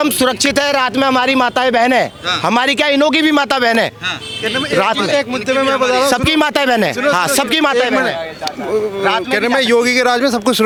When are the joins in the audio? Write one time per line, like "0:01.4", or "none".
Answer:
none